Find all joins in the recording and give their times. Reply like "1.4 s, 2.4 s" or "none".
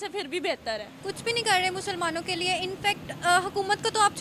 0.9 s